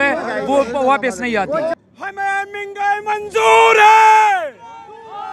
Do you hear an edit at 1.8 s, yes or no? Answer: yes